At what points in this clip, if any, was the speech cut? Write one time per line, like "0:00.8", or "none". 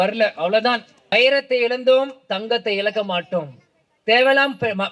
0:01.1